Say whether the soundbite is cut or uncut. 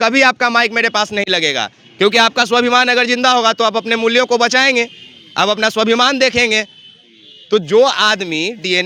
uncut